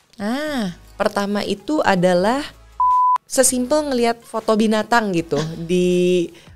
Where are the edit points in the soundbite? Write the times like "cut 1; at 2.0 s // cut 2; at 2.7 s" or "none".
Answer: cut 1; at 2.8 s